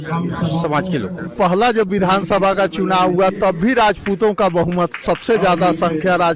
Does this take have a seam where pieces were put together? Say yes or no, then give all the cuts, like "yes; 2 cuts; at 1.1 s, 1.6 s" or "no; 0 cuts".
yes; 1 cut; at 1.3 s